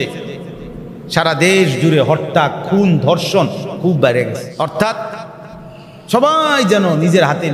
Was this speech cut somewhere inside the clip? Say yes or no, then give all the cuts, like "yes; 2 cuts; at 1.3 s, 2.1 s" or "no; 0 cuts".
yes; 1 cut; at 4.5 s